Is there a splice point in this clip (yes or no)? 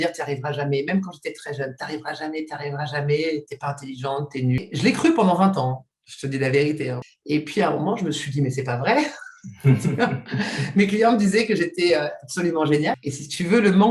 yes